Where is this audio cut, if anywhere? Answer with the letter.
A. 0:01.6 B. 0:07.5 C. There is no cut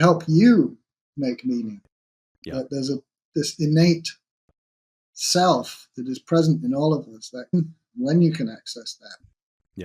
B